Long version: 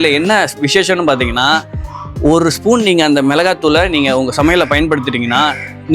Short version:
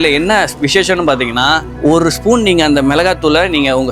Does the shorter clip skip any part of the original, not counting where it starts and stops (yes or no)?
yes